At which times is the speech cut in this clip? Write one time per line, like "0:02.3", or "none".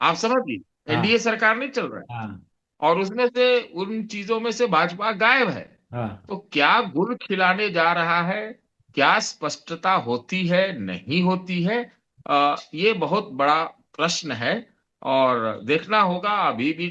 none